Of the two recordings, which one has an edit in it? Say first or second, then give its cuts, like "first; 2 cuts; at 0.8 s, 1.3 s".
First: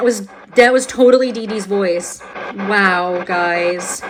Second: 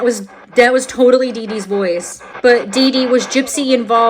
second; 1 cut; at 2.2 s